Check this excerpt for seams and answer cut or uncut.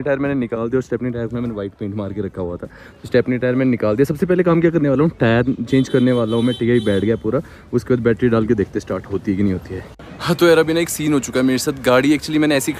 uncut